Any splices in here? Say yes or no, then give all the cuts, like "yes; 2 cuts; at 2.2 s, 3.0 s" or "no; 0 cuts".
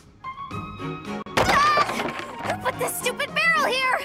yes; 1 cut; at 1.3 s